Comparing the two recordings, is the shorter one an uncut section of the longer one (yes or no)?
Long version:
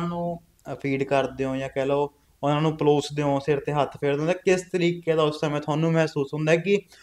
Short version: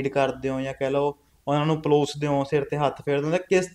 yes